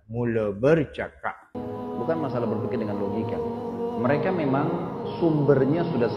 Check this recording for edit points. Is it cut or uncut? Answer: cut